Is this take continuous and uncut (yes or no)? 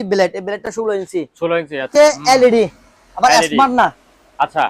no